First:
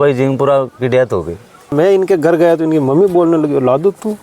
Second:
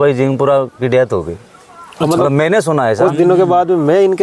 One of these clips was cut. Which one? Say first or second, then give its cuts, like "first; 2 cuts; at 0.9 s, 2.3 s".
first; 1 cut; at 1.7 s